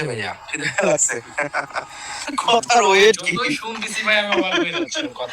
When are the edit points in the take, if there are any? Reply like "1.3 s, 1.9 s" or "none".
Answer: 2.1 s